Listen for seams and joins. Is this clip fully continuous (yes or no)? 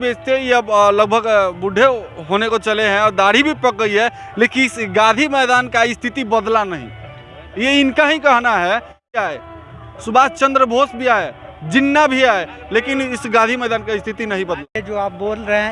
no